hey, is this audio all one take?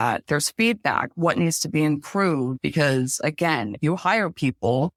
yes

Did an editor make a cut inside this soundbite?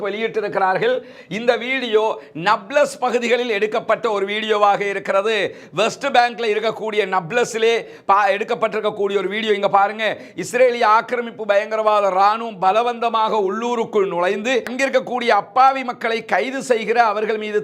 no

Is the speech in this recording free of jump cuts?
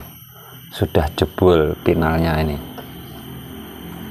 yes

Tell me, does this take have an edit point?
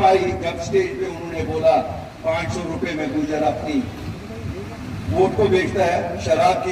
no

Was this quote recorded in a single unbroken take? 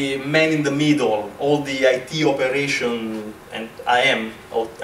yes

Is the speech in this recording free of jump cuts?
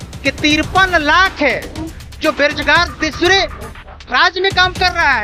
yes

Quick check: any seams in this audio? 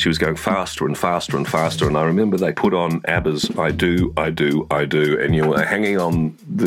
yes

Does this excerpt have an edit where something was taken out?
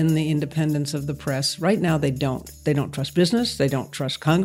yes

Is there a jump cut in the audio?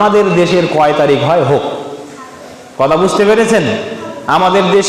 no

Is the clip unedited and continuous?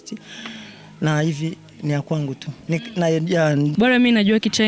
no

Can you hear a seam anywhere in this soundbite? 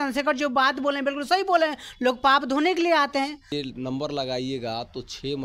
yes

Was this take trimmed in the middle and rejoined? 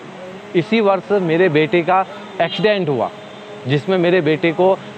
no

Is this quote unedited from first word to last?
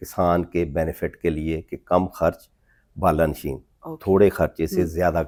yes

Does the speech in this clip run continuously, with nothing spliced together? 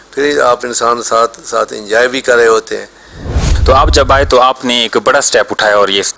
no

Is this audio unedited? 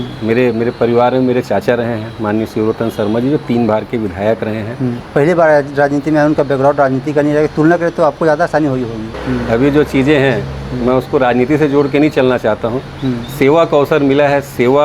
no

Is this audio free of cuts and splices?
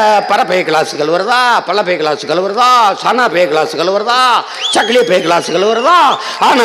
yes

